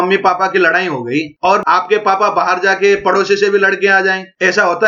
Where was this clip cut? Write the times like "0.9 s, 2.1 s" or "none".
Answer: none